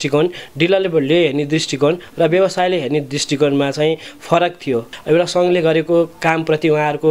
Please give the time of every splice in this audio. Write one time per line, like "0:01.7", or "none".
0:04.9